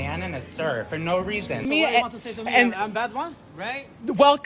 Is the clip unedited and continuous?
no; 1 cut; at 1.6 s

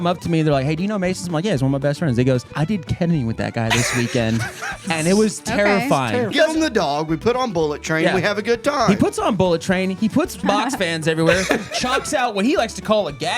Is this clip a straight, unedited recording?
no; 3 cuts; at 2.5 s, 6.3 s, 10.4 s

